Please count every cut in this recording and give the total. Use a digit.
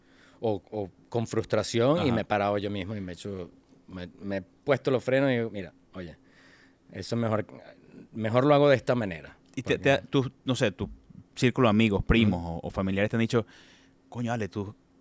0